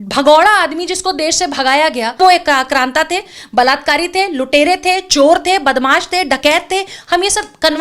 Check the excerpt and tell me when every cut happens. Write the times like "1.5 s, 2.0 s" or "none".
2.2 s